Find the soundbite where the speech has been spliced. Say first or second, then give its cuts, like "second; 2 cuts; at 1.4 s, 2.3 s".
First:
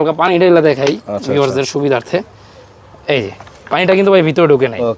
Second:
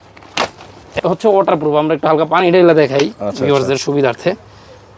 second; 1 cut; at 1.0 s